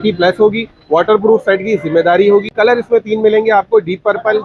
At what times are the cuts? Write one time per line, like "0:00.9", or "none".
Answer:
0:02.5